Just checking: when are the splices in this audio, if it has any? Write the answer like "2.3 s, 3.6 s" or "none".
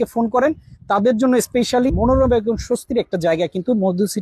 1.9 s